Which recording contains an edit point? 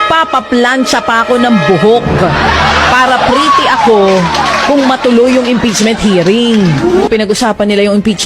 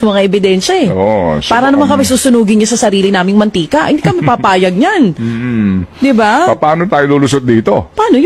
first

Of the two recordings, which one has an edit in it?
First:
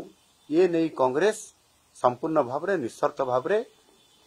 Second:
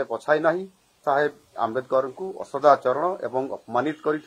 second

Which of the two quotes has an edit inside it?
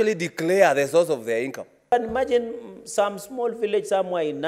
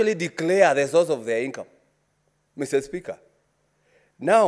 first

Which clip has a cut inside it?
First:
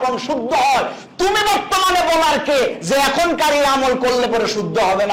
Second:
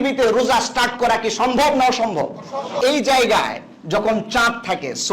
second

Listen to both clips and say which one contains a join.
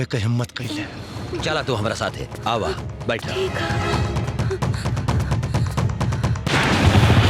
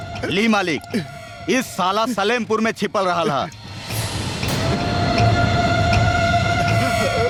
first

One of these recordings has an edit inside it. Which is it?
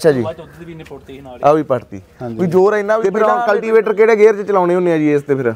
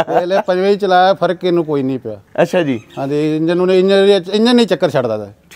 first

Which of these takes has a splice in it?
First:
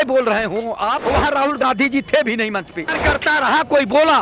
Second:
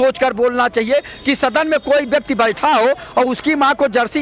first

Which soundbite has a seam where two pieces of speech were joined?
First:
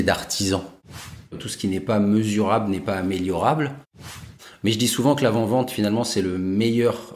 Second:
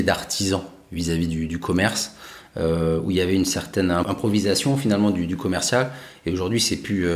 first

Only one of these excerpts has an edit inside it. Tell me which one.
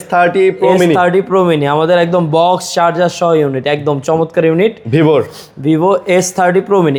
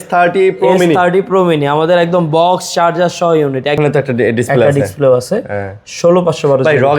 second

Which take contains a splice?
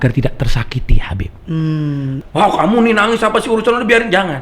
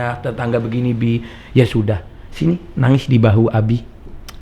first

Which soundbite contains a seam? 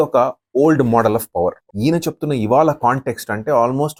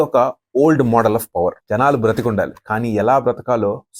second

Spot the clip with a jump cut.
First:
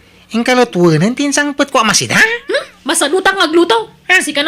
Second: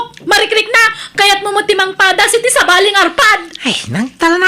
second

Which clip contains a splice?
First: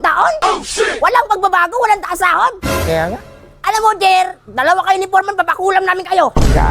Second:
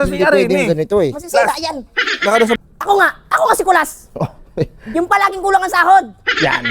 second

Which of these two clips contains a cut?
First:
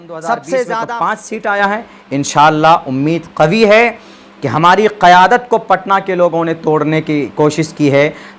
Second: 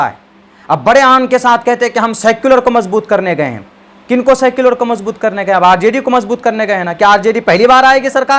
first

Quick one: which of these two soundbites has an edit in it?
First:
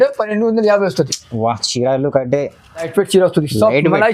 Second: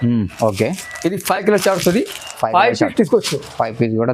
first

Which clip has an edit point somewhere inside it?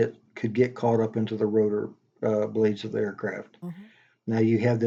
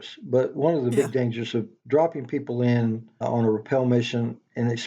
second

